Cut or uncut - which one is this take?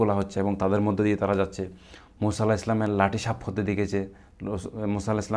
uncut